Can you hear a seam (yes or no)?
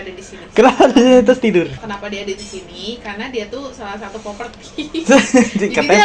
no